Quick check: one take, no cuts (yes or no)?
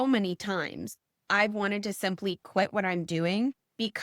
yes